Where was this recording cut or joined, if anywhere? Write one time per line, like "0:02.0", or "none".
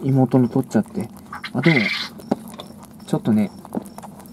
none